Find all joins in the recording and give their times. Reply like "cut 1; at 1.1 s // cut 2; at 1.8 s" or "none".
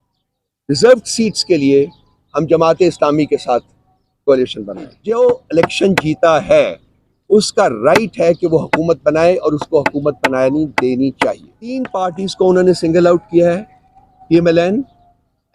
cut 1; at 4.9 s // cut 2; at 11.9 s